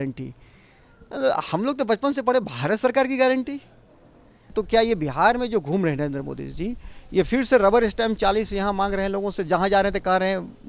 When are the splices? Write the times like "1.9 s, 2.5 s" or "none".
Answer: 4.5 s